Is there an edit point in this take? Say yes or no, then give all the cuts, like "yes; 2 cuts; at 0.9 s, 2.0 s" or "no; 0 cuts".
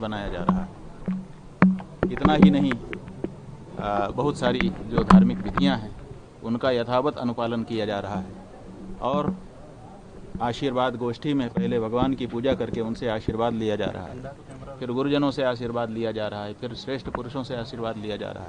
no; 0 cuts